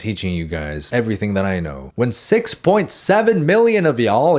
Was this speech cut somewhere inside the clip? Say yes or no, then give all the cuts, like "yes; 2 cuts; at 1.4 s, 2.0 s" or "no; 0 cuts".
no; 0 cuts